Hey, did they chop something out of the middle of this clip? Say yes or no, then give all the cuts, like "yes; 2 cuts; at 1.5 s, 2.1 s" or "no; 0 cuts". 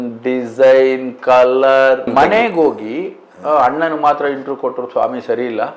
yes; 1 cut; at 2.1 s